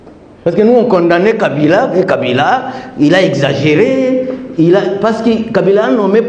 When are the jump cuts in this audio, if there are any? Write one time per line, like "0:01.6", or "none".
none